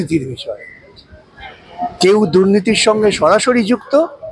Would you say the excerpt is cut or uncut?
uncut